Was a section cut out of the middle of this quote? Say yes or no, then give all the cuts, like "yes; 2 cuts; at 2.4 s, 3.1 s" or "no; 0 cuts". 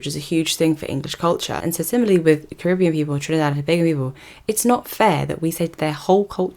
yes; 1 cut; at 1.6 s